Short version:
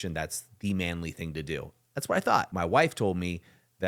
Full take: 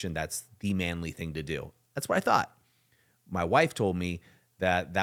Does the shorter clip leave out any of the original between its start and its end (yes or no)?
yes